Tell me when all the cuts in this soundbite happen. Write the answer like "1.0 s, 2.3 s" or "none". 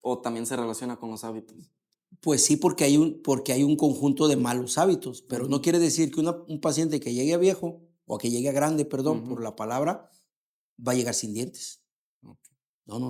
none